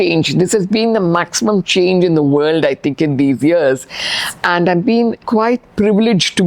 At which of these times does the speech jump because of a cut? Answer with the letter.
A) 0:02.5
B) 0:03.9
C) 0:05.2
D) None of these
C